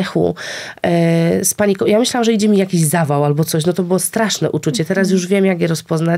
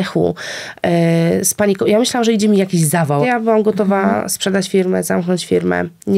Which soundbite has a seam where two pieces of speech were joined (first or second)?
second